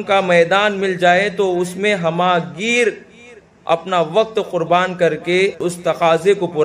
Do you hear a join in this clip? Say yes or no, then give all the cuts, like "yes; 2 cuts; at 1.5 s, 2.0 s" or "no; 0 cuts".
yes; 1 cut; at 5.6 s